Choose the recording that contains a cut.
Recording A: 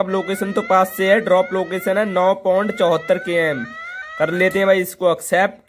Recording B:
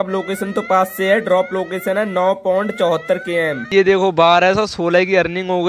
B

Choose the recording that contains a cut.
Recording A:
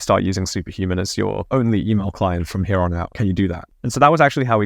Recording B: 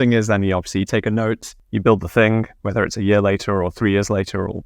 A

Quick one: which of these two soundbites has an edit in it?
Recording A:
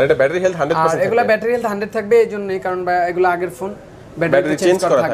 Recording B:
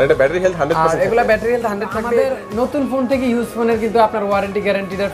B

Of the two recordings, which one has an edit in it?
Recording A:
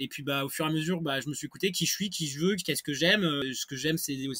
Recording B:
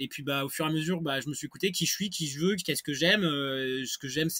A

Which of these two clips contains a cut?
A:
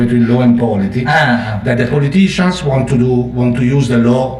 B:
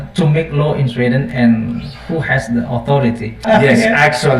B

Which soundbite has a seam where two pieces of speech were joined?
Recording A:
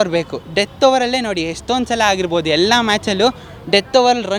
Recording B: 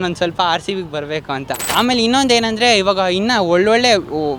B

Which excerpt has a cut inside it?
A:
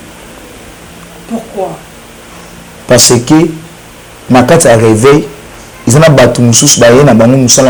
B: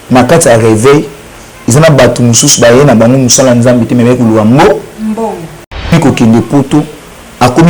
B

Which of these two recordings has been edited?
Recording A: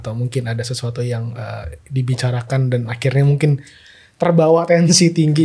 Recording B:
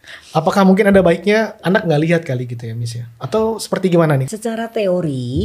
B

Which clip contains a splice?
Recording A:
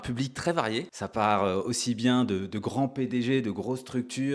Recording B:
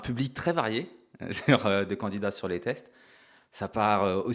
A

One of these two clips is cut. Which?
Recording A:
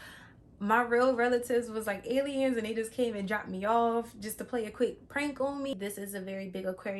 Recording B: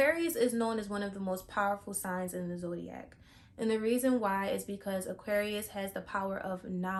A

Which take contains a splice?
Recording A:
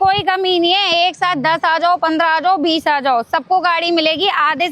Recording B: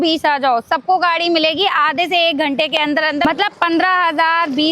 B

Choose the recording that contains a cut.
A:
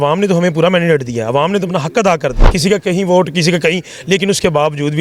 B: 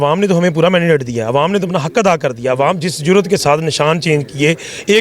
A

